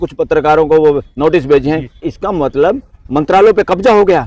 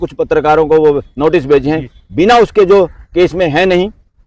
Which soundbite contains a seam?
first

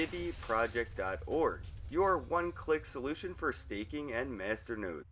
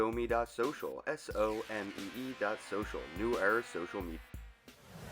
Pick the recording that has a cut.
second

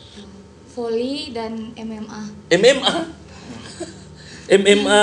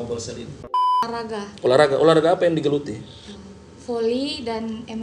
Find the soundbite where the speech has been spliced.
second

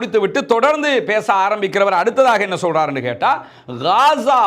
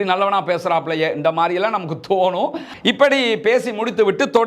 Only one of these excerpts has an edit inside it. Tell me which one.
second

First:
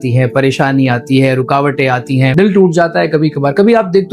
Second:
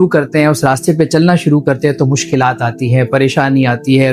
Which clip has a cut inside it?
first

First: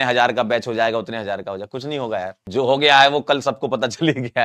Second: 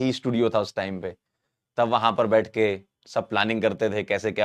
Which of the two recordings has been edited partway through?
first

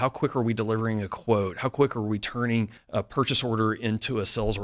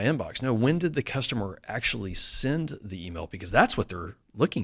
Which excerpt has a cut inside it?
first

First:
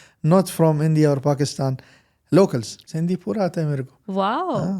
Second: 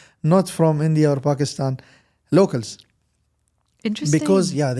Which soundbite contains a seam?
first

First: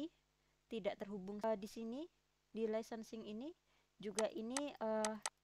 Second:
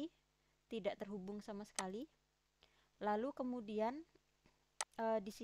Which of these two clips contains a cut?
first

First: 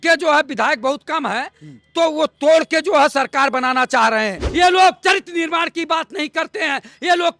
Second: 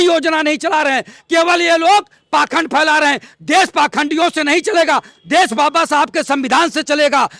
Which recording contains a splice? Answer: first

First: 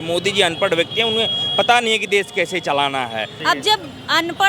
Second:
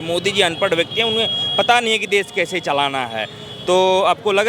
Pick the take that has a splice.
first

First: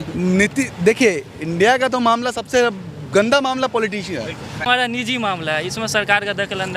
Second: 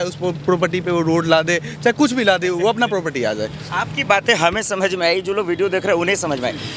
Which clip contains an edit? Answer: first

